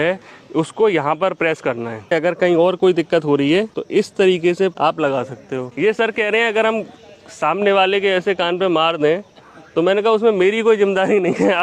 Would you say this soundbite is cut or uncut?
cut